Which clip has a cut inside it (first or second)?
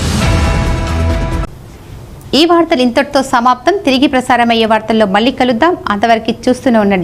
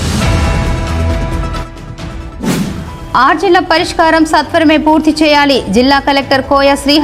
second